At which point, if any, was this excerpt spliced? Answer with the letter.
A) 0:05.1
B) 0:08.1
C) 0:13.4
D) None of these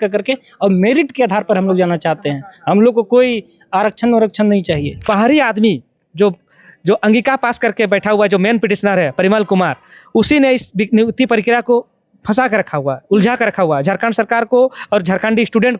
A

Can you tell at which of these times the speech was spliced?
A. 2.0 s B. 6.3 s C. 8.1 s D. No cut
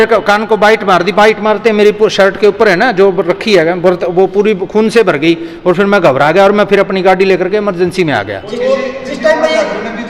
D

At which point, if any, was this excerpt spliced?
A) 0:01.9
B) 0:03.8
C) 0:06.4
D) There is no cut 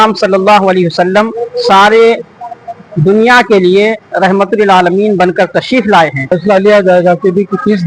C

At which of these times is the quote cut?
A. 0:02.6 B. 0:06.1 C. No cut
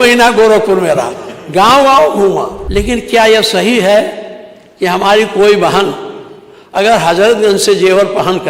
A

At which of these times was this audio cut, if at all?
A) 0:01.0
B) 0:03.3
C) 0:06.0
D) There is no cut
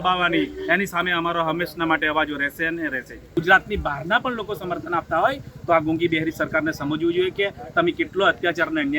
B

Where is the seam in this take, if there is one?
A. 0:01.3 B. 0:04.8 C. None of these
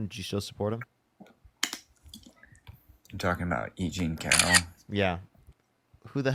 C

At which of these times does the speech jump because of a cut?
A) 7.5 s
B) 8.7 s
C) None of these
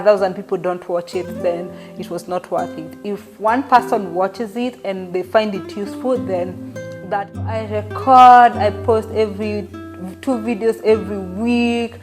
A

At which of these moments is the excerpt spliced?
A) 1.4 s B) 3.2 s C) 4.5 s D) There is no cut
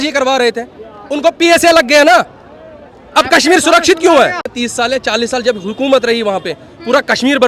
C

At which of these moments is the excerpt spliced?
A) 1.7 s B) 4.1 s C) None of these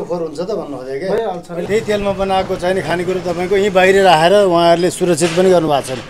A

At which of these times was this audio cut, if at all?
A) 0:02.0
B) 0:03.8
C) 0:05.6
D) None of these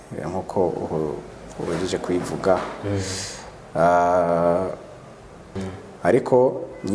C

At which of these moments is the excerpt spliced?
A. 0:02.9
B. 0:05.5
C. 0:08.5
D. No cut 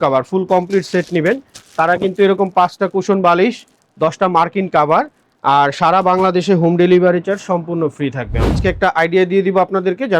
C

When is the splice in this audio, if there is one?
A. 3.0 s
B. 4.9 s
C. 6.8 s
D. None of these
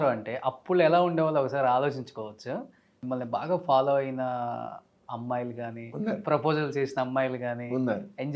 A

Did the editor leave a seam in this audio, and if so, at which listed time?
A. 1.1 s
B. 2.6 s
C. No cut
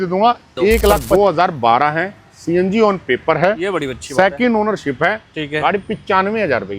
A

